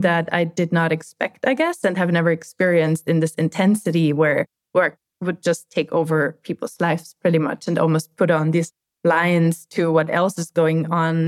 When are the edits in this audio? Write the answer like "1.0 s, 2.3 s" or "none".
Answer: none